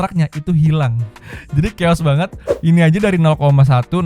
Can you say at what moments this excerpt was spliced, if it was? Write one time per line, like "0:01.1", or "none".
0:02.4